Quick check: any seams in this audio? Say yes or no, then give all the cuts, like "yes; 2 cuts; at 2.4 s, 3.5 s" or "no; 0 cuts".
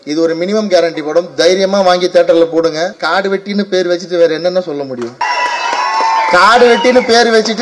yes; 2 cuts; at 3.0 s, 5.2 s